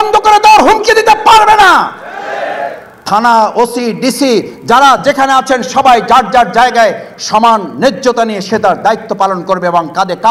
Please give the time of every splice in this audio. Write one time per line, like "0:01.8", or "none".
none